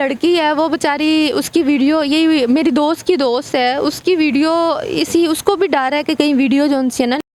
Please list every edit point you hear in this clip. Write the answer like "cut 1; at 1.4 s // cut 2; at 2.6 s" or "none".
none